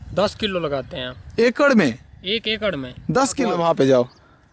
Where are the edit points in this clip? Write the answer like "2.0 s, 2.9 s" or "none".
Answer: 3.5 s